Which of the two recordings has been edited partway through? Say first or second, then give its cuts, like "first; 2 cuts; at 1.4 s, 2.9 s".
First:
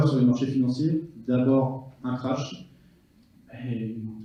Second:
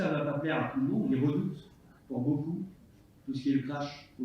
second; 1 cut; at 1.1 s